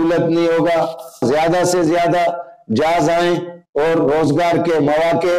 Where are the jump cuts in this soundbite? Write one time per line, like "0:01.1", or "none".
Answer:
0:01.2